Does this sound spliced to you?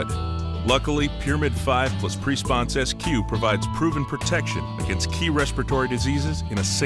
no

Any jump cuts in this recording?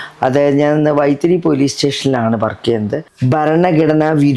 yes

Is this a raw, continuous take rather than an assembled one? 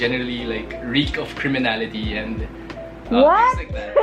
yes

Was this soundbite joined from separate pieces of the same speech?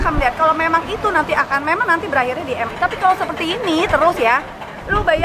yes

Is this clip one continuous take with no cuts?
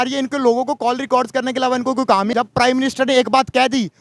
no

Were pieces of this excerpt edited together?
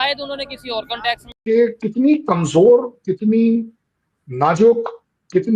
yes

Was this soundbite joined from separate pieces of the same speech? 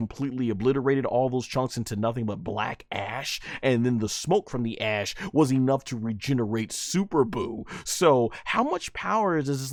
no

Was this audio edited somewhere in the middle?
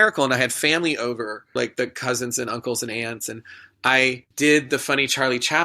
yes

